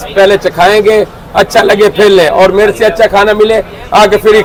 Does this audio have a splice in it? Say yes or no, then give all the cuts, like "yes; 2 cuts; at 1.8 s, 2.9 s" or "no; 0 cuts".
no; 0 cuts